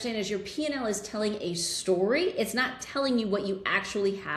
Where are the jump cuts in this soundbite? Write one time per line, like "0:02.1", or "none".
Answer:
none